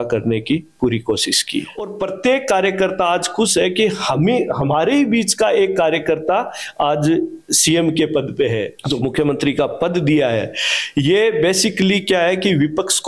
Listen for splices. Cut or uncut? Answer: cut